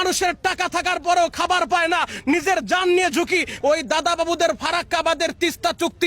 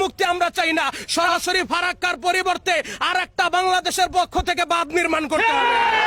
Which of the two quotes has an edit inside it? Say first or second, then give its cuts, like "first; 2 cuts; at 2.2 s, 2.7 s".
first; 1 cut; at 3.5 s